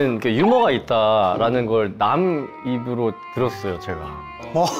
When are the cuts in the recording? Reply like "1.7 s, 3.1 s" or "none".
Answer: none